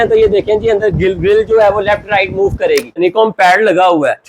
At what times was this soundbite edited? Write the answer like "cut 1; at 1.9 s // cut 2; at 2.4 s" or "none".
cut 1; at 3.0 s